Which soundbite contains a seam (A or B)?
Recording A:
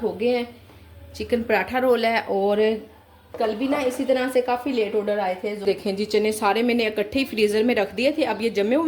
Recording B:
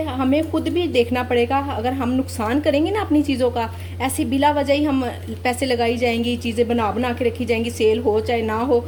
A